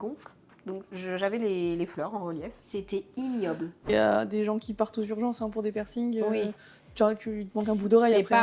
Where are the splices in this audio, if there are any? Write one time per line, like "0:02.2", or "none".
0:02.7
0:03.9